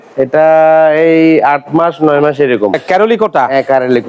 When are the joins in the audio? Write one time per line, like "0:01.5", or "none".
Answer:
0:02.8

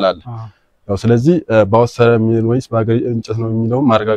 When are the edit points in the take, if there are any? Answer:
none

